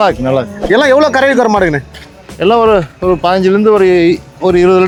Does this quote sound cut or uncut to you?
uncut